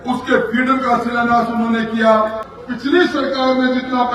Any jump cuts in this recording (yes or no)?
yes